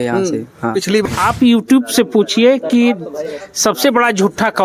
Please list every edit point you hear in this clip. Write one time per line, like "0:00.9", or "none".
0:01.0